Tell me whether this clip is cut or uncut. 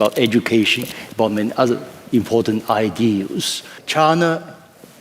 cut